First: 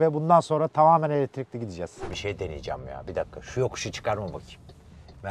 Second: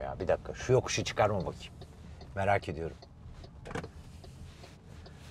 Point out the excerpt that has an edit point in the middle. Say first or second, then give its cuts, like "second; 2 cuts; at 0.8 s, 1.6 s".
first; 1 cut; at 1.9 s